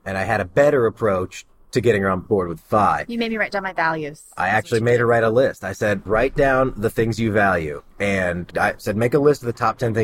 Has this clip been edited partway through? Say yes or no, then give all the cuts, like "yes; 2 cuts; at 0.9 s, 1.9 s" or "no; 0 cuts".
yes; 1 cut; at 6.0 s